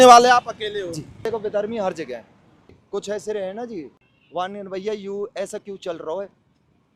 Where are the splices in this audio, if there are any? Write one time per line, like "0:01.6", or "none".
0:01.2
0:02.7
0:04.0